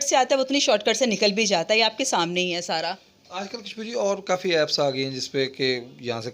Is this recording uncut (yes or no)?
yes